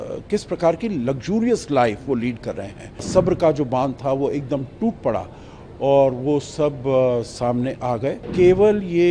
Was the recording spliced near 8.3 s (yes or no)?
yes